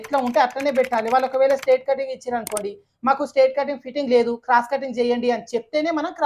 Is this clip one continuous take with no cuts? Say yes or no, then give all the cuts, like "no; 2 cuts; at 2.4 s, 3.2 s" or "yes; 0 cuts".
yes; 0 cuts